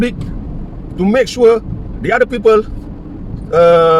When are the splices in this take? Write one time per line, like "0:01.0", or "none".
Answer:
none